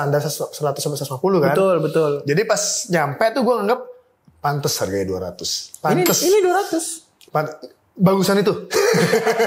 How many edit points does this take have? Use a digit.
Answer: 0